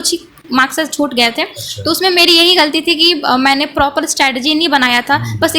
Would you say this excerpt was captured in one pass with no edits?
yes; 0 cuts

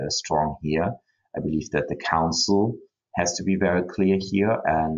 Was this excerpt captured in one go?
yes; 0 cuts

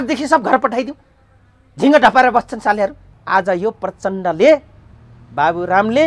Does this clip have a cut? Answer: yes; 1 cut; at 3.1 s

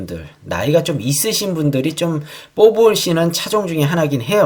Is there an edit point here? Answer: no; 0 cuts

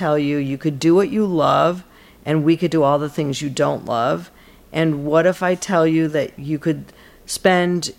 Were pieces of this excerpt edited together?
no; 0 cuts

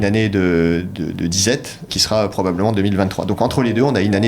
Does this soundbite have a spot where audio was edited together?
yes; 1 cut; at 1.9 s

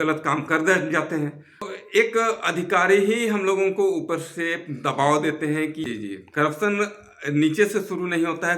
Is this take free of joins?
no; 2 cuts; at 1.7 s, 5.9 s

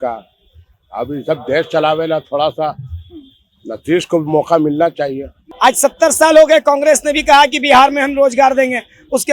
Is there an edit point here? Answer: yes; 1 cut; at 5.4 s

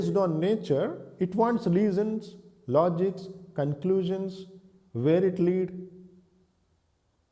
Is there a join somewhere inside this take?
yes; 1 cut; at 1.0 s

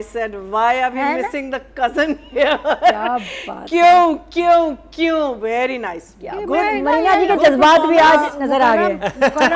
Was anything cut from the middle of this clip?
no; 0 cuts

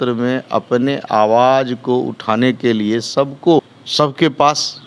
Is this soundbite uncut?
no; 1 cut; at 3.6 s

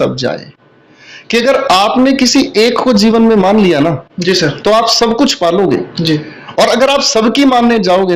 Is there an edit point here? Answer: no; 0 cuts

